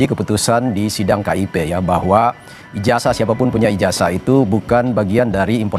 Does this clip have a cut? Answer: no; 0 cuts

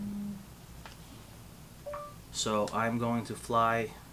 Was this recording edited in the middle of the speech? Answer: yes; 1 cut; at 1.6 s

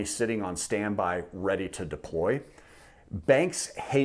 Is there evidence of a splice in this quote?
no; 0 cuts

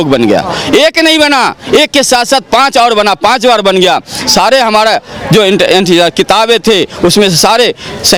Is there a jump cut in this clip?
no; 0 cuts

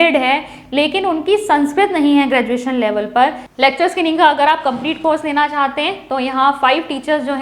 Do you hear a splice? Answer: yes; 1 cut; at 3.4 s

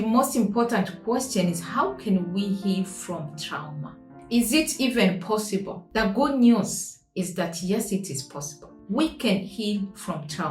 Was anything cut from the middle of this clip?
no; 0 cuts

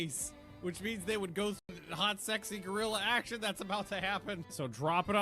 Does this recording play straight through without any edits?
no; 1 cut; at 1.7 s

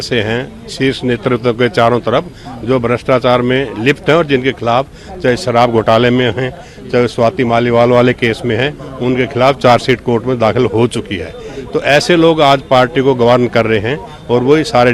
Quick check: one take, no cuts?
yes; 0 cuts

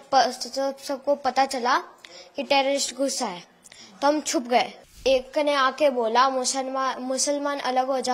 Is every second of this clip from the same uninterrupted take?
no; 1 cut; at 5.0 s

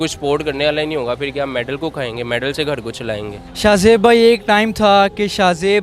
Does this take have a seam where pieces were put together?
no; 0 cuts

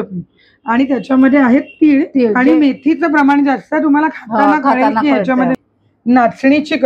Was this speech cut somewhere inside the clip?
yes; 1 cut; at 5.6 s

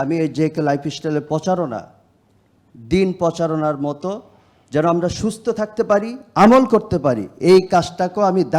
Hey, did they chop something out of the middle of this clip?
no; 0 cuts

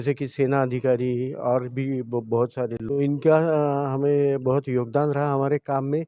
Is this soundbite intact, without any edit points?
no; 1 cut; at 2.8 s

